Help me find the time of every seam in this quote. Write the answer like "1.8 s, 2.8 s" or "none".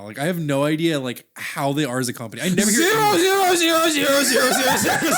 none